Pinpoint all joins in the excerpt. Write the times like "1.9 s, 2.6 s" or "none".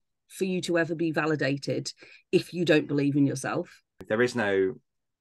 4.0 s